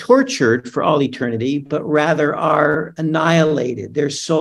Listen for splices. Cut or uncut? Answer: cut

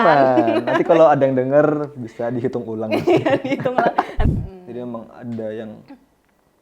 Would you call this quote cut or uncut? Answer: cut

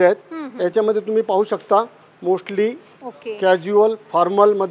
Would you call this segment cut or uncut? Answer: uncut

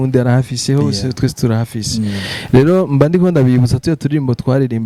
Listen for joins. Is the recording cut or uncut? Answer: uncut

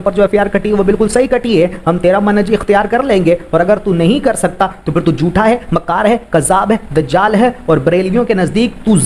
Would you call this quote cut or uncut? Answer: uncut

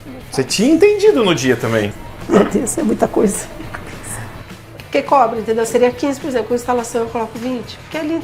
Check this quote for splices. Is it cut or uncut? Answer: cut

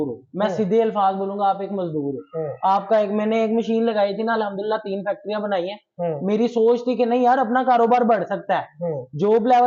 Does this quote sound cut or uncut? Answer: uncut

